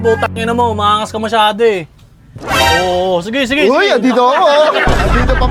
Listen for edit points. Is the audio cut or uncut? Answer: uncut